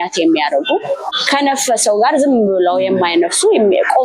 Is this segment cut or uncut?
cut